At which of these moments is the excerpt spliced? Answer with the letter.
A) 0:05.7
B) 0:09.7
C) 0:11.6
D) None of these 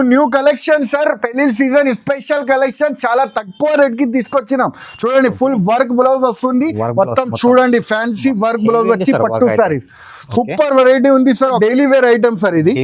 C